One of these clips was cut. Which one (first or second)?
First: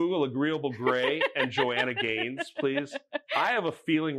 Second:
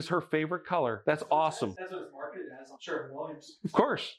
second